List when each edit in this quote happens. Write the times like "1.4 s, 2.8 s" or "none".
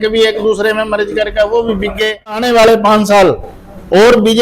2.5 s